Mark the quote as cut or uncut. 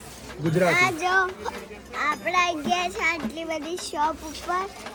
uncut